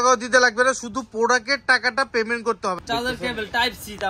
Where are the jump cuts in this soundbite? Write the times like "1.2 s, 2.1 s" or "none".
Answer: 2.8 s